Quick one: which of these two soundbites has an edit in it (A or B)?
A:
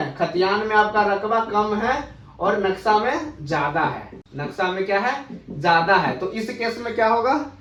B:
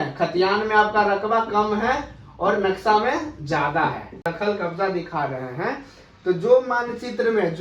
B